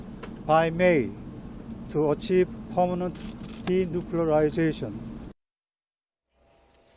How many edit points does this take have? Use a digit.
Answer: 1